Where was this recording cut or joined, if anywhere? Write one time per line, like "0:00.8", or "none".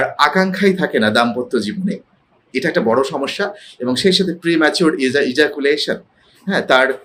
none